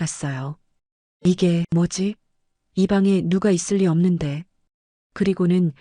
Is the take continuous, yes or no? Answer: no